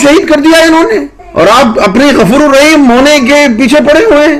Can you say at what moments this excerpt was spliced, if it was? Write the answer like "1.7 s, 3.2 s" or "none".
1.2 s